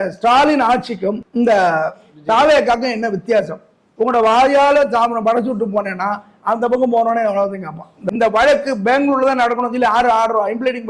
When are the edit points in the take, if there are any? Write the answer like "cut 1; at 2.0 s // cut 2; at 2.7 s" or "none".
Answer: cut 1; at 1.2 s // cut 2; at 7.9 s